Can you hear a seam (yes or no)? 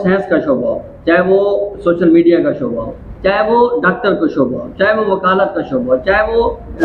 no